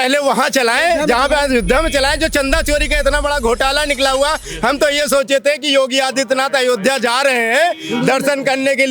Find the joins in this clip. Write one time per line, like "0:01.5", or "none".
none

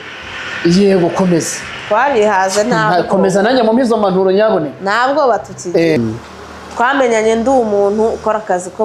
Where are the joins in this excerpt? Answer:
0:06.0

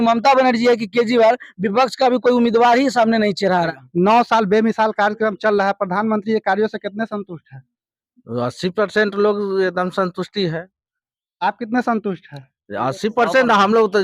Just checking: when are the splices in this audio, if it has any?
0:03.8

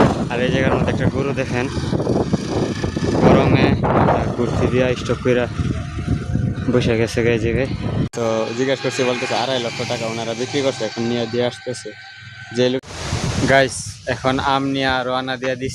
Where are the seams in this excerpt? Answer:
0:08.1
0:12.8

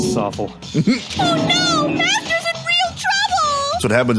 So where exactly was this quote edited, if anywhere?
0:01.1

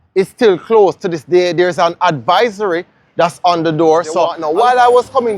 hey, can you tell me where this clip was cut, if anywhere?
0:04.4

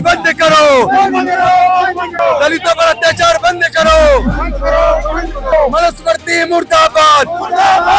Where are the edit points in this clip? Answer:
0:02.1
0:05.5

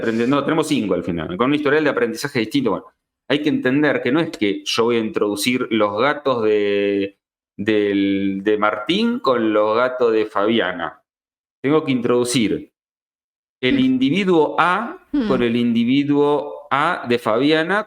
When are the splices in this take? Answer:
none

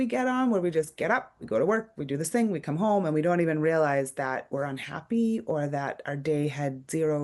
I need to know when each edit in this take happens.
none

